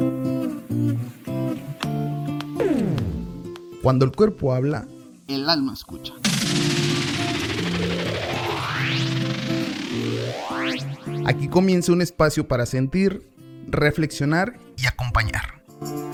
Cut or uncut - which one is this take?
uncut